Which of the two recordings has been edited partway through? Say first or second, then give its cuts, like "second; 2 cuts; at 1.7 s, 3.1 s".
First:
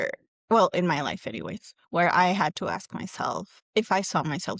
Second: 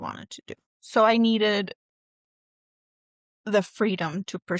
first; 1 cut; at 3.5 s